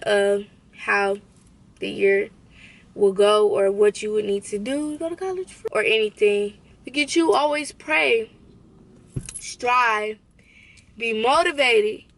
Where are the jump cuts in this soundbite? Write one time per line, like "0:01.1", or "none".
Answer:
0:05.5